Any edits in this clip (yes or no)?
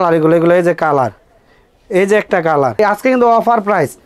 yes